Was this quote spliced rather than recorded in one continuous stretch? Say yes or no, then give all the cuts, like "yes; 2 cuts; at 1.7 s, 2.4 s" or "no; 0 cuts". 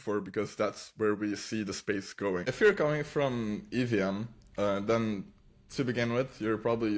yes; 1 cut; at 2.5 s